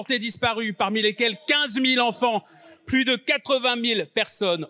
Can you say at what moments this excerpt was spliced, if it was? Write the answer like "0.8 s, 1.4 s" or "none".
none